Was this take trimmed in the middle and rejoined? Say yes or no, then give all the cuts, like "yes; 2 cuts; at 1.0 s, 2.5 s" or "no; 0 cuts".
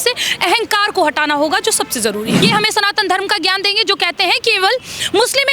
yes; 1 cut; at 2.4 s